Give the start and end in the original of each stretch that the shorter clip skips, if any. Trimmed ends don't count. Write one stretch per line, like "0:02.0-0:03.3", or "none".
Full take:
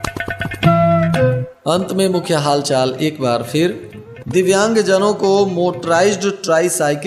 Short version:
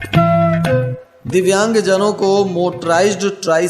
0:01.5-0:04.0